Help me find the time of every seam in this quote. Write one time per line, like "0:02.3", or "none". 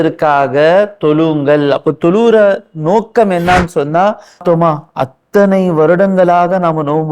0:04.4